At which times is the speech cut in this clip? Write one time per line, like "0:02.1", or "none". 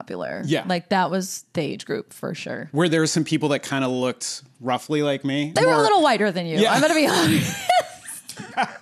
0:05.6